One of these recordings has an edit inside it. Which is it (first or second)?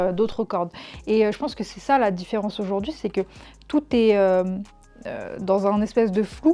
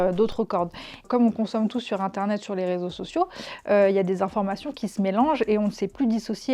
second